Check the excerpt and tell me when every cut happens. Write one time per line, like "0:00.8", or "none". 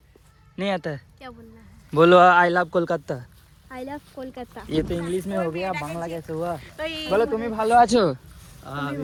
none